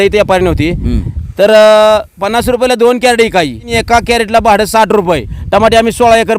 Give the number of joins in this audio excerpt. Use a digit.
2